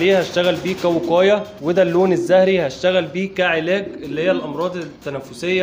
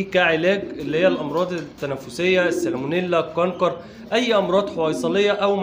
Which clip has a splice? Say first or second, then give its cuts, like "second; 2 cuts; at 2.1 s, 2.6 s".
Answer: first; 1 cut; at 1.5 s